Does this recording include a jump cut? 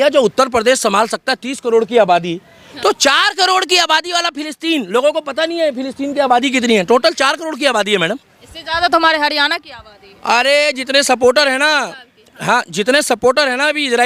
no; 0 cuts

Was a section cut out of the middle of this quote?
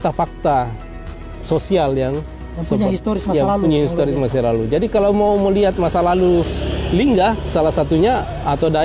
no; 0 cuts

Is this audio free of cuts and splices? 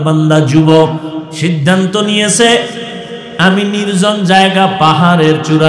no; 1 cut; at 1.3 s

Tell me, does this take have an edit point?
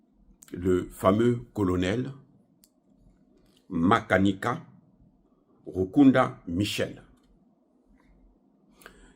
no; 0 cuts

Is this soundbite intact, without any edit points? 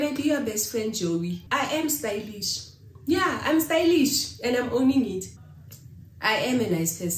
no; 2 cuts; at 1.4 s, 5.3 s

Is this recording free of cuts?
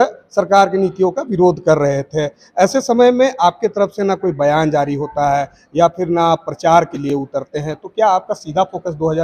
yes; 0 cuts

